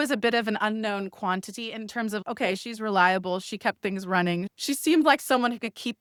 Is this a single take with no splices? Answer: yes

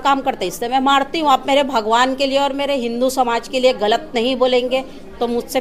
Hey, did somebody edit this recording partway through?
no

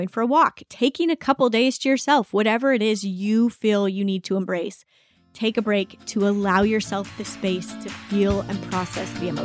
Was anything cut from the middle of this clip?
no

